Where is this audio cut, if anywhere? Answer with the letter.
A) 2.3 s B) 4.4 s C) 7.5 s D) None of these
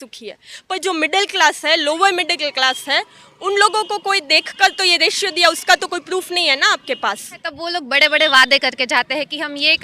C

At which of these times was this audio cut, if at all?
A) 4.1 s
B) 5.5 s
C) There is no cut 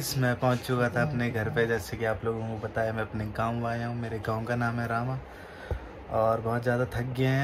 C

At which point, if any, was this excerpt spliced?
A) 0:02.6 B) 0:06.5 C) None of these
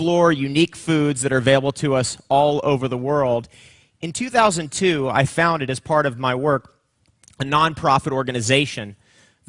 A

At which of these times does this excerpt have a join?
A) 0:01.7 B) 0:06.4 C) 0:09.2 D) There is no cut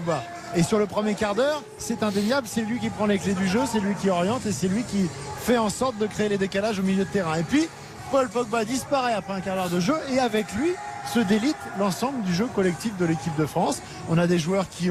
D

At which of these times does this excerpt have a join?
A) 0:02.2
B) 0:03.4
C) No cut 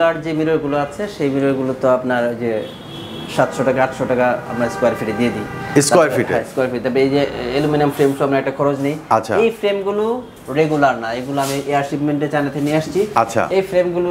C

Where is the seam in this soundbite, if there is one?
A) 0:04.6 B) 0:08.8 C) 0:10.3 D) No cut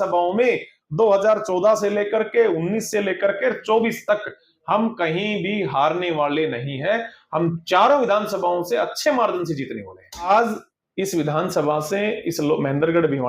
C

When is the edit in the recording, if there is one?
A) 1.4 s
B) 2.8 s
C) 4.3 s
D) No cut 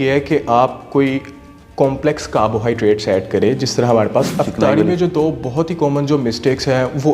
C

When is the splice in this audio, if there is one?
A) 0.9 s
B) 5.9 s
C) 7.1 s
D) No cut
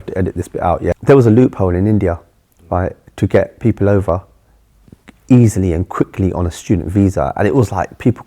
A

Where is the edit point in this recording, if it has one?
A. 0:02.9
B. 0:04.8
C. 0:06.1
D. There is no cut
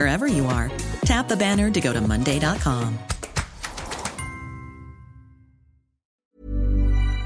C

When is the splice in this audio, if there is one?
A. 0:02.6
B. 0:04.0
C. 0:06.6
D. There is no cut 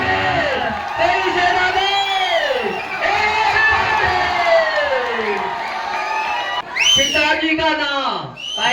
C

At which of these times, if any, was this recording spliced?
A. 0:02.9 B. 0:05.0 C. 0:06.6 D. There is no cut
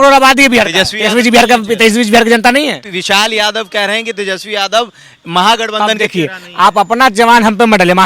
A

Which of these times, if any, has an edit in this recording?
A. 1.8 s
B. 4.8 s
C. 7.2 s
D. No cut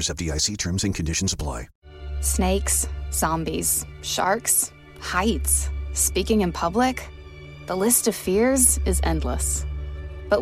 A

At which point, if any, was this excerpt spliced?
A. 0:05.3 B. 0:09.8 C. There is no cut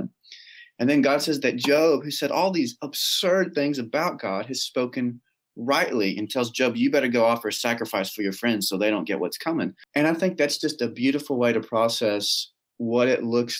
B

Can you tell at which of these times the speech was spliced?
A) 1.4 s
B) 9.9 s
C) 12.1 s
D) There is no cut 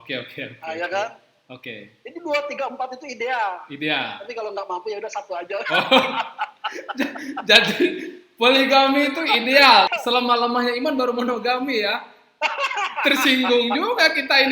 B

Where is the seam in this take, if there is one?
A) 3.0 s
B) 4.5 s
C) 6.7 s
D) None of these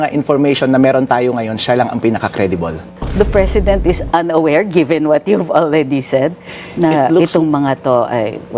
A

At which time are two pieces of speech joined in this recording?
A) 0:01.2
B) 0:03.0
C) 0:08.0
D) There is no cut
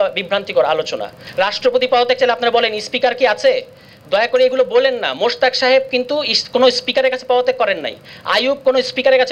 A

